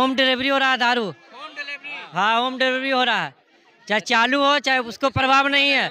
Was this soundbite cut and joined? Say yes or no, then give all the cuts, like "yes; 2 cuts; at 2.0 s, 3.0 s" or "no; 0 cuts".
no; 0 cuts